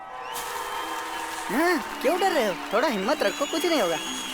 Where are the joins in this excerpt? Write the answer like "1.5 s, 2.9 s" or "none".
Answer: none